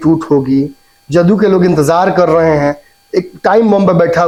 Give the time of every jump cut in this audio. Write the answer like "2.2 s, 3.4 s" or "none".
none

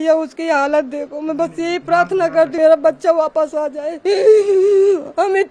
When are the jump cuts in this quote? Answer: 2.5 s

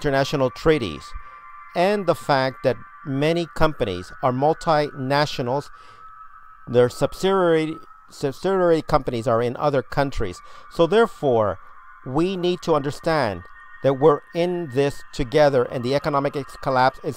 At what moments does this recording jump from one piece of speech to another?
12.9 s

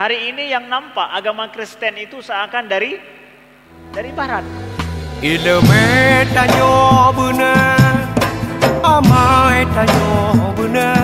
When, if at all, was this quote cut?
4.5 s

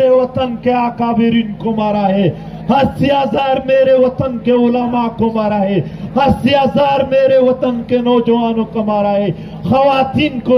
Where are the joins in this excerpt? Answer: none

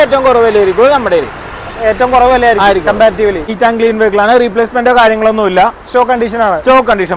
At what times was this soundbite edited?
3.5 s

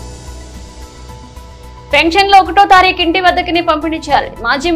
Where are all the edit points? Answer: 1.7 s

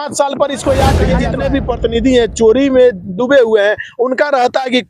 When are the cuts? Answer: 1.2 s

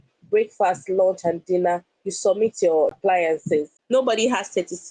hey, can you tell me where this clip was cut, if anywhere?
3.7 s

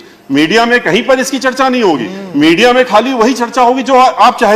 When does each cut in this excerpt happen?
none

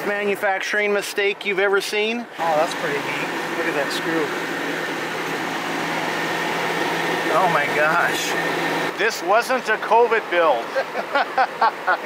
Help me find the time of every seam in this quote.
2.3 s, 8.9 s

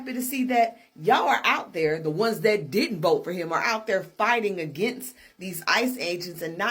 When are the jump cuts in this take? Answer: none

